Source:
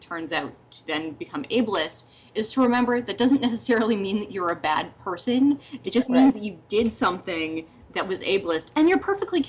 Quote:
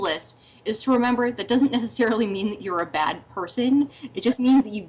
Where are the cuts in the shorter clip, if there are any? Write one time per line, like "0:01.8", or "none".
none